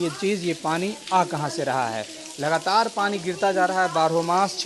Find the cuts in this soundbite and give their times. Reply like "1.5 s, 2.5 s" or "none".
none